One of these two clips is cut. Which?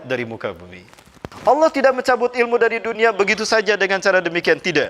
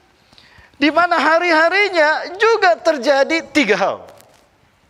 first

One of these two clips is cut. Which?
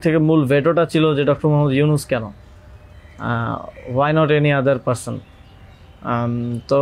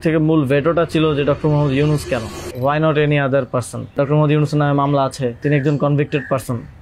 second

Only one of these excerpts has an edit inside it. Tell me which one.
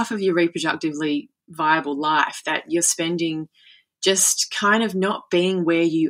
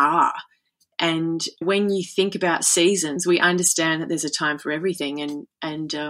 second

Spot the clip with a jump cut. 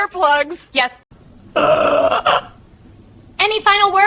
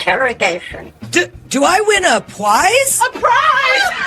first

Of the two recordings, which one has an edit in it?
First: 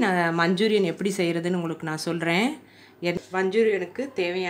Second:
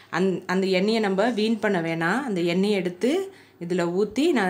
first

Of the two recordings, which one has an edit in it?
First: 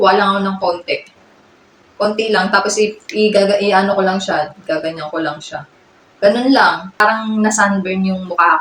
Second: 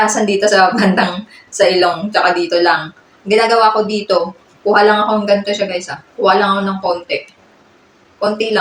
first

